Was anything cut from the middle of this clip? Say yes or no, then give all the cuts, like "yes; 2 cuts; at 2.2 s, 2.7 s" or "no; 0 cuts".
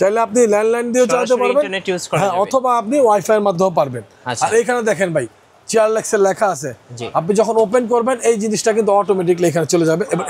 no; 0 cuts